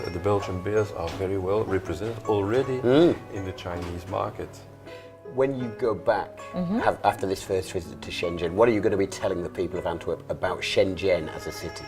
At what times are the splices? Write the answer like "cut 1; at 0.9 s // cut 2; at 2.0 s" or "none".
cut 1; at 4.8 s